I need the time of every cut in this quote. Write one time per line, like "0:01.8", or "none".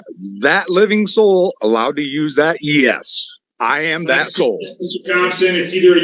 none